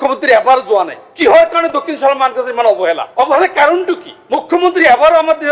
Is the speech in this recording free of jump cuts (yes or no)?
no